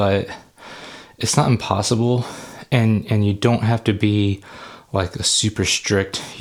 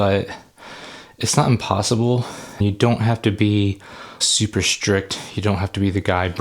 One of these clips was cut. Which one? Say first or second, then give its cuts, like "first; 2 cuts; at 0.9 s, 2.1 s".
second; 2 cuts; at 2.6 s, 4.2 s